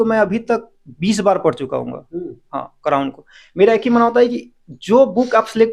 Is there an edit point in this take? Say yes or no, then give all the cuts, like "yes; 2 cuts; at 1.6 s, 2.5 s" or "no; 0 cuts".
no; 0 cuts